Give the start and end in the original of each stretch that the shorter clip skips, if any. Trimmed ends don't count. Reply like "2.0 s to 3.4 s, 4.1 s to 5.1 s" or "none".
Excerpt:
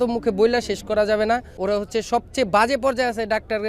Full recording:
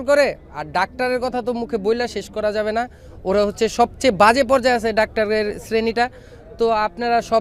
3.0 s to 3.2 s